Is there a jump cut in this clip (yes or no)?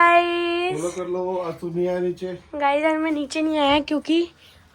no